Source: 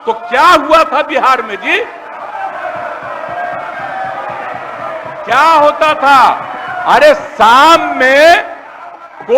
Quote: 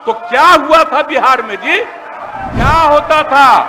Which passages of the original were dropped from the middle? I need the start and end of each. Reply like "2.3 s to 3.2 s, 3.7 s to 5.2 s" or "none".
2.5 s to 5.2 s